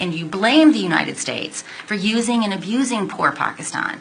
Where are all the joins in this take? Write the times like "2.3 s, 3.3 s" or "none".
none